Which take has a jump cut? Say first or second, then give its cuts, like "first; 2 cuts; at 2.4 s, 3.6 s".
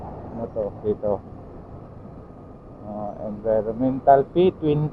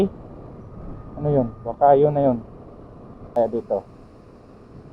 second; 1 cut; at 3.2 s